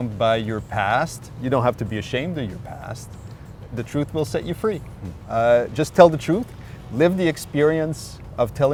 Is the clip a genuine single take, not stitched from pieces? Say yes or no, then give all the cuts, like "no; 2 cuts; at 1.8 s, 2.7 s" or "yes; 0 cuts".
yes; 0 cuts